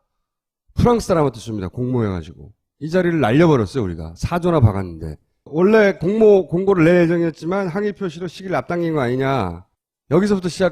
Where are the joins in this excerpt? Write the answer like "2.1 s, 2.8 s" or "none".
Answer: none